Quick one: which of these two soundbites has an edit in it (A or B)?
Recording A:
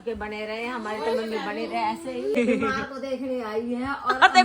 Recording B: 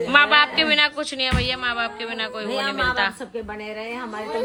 A